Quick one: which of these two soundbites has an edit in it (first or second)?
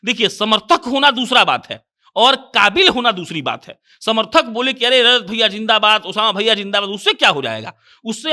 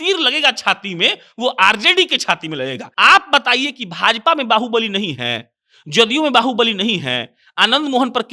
second